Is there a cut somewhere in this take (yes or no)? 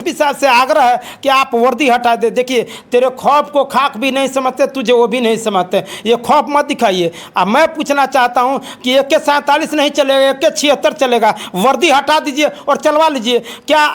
no